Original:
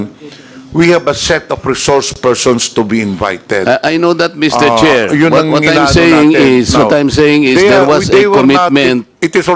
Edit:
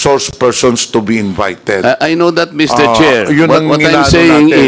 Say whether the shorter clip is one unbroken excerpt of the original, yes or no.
yes